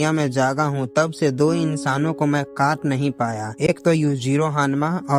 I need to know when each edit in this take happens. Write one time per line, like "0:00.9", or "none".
none

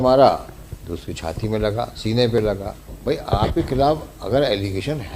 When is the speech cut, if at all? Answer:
0:02.9

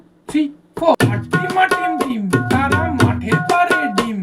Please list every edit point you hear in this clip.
0:01.2

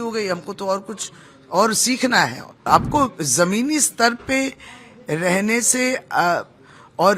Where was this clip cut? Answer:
0:02.6

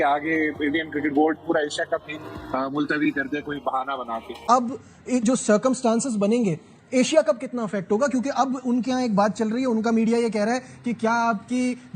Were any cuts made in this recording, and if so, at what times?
0:04.4

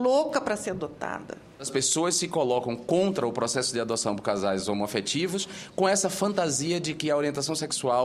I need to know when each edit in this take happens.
0:01.7

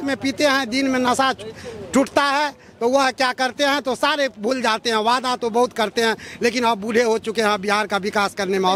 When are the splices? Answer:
none

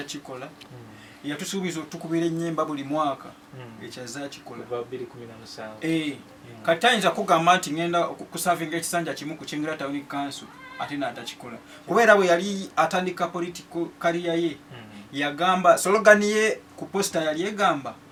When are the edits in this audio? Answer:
none

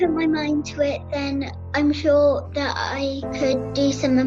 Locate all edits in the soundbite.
0:01.6
0:03.2

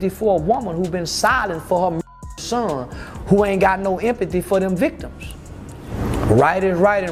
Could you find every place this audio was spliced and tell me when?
none

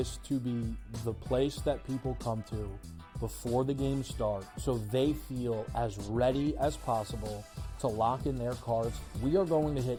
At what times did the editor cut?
none

